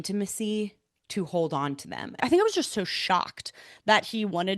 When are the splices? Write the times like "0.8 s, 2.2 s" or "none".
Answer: 2.2 s